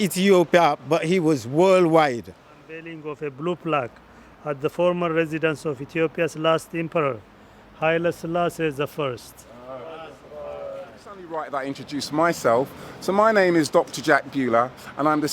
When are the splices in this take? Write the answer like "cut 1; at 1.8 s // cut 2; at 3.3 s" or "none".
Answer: cut 1; at 2.9 s // cut 2; at 11.3 s